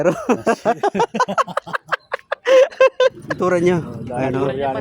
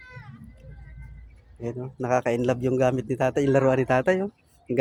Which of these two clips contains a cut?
first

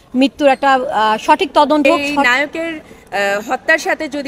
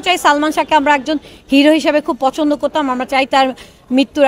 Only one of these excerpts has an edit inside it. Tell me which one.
first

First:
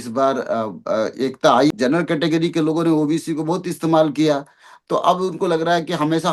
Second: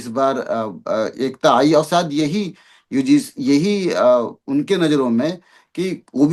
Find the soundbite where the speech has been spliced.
first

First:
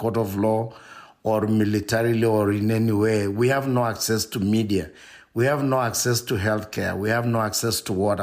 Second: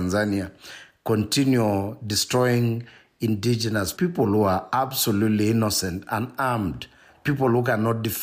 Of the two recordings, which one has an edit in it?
second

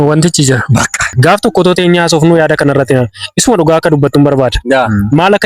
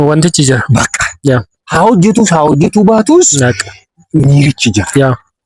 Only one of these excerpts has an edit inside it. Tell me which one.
first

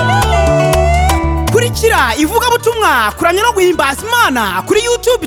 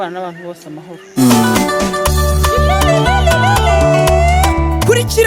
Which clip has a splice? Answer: second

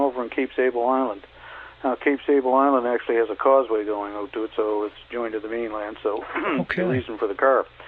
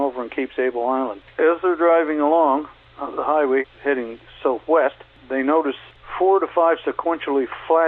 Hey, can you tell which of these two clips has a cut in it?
second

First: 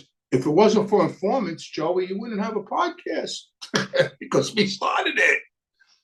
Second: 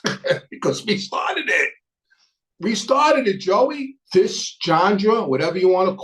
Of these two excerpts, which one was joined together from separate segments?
second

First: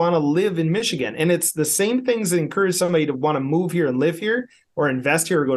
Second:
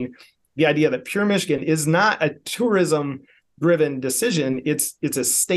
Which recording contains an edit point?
second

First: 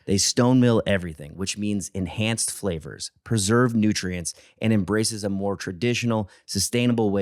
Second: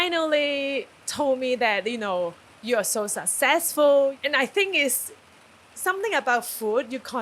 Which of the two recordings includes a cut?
second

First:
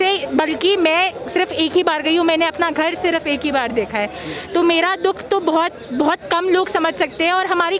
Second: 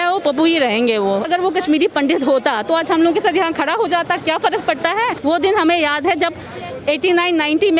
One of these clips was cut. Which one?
second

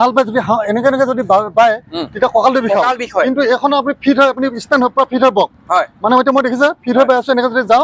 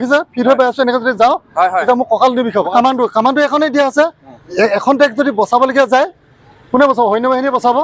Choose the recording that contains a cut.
second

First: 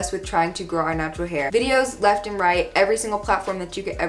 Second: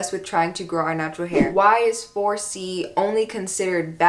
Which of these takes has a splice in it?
second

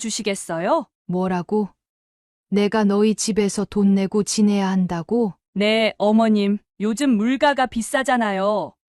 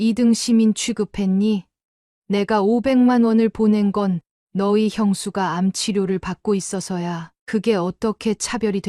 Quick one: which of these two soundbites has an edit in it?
first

